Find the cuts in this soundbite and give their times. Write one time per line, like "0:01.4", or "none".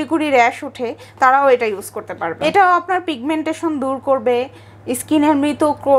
0:02.3